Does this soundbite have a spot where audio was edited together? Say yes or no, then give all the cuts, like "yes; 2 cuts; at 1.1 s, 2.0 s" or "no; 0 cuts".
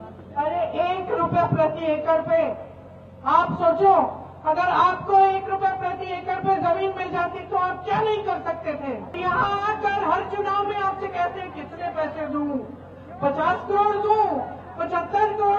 yes; 1 cut; at 9.2 s